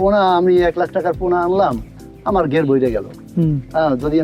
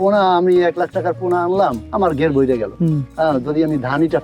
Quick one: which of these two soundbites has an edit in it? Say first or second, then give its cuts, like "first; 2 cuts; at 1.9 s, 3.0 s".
second; 2 cuts; at 1.8 s, 2.7 s